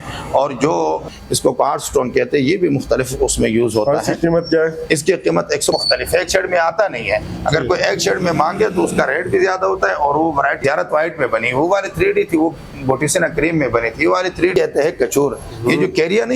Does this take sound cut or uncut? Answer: cut